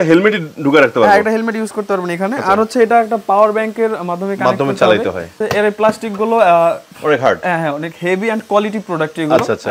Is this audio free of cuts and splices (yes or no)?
no